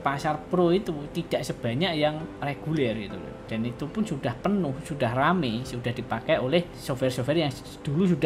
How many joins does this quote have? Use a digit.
2